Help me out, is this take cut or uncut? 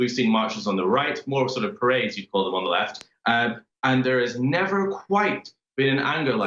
uncut